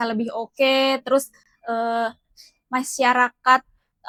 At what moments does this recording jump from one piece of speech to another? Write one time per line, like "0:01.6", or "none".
none